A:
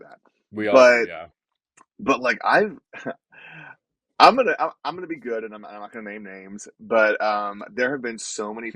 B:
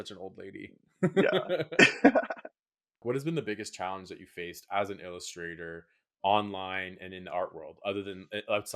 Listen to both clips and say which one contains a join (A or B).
B